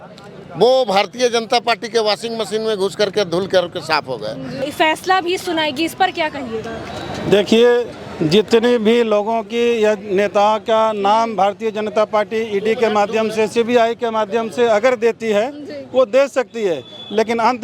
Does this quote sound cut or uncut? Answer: cut